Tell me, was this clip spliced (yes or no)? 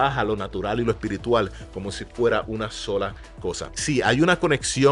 no